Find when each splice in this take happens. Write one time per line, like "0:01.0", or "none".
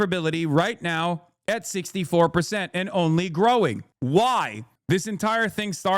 0:04.7